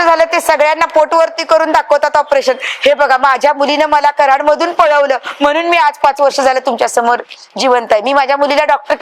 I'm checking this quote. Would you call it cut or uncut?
uncut